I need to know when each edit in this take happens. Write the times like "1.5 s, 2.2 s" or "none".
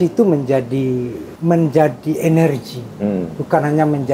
1.2 s